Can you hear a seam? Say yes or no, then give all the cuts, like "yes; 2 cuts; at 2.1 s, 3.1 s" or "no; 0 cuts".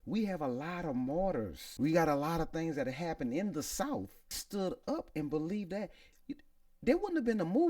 yes; 2 cuts; at 1.6 s, 4.4 s